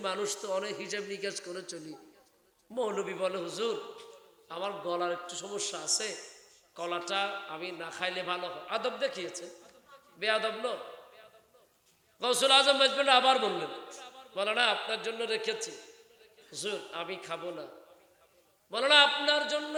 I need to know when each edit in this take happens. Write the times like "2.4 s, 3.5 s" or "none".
none